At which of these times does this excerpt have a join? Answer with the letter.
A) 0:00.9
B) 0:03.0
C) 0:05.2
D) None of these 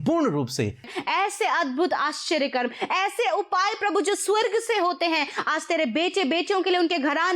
A